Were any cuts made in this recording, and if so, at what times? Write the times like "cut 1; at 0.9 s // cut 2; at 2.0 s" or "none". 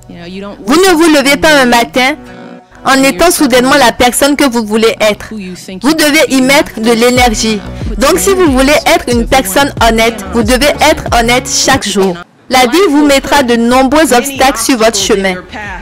cut 1; at 12.3 s